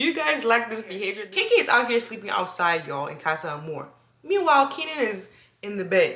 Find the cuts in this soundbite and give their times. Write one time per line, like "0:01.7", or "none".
0:01.2